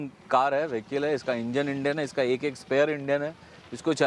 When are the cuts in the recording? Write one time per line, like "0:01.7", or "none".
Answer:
none